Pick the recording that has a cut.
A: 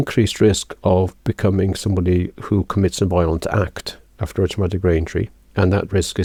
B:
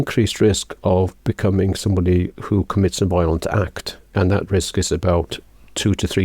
B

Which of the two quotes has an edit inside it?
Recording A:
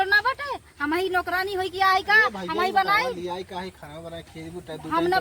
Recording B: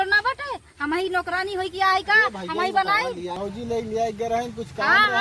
B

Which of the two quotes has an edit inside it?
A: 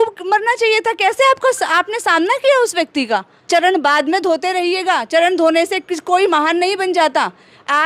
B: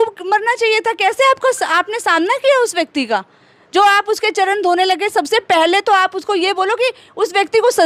A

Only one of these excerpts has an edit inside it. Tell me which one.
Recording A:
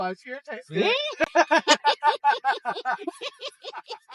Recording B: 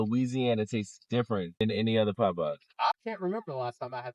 B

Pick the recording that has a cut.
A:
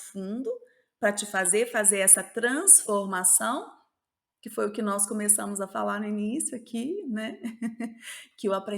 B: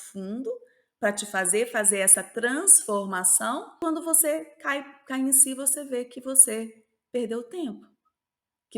B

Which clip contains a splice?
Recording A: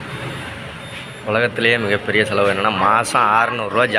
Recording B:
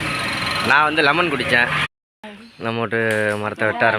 B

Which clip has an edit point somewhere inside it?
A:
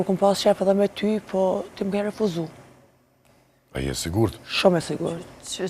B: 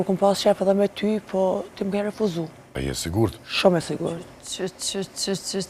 B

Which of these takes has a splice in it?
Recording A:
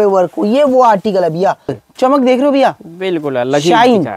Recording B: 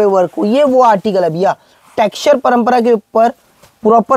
A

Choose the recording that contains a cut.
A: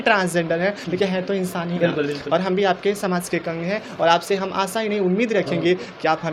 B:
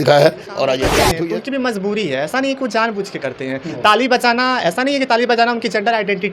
B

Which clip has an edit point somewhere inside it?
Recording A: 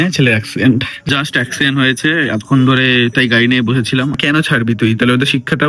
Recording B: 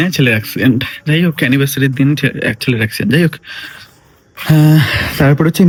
A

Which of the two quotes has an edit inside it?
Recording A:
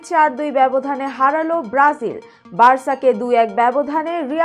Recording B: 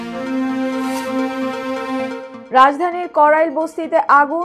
B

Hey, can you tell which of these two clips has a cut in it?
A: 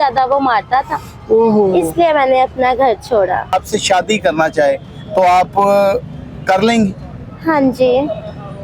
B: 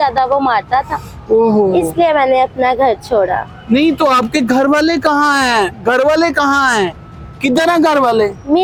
A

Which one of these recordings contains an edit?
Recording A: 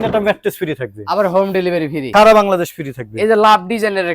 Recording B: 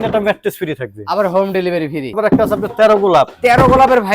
B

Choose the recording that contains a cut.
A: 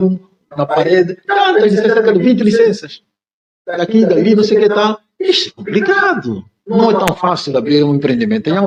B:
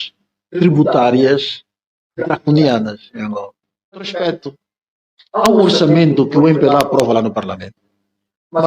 B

